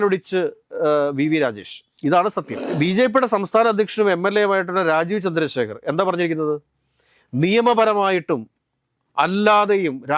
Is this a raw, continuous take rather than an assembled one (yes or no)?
no